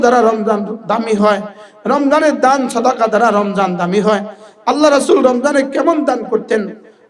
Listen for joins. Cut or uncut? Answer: uncut